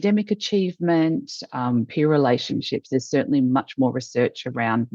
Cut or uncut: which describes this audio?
uncut